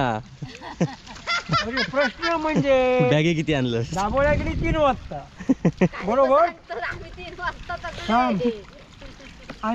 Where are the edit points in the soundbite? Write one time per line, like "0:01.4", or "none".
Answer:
none